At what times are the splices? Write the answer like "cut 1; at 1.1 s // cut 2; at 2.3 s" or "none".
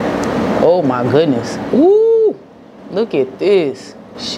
none